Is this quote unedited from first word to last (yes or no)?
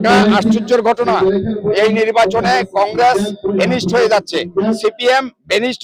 yes